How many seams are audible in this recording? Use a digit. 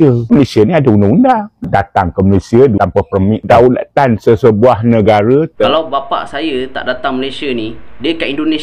2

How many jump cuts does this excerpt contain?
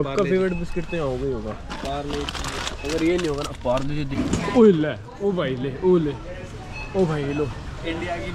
1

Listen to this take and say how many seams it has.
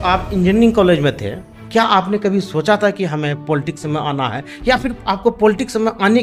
0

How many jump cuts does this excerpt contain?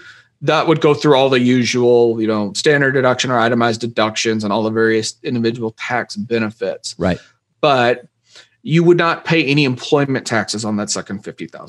0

